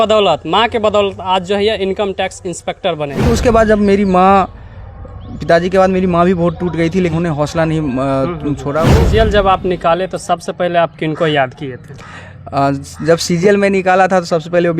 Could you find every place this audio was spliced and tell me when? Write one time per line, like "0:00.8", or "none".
0:03.3
0:07.1
0:08.9